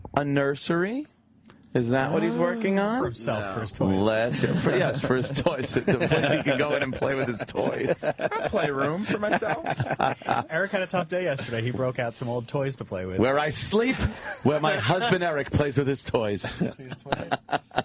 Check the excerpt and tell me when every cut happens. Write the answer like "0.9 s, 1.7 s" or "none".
7.5 s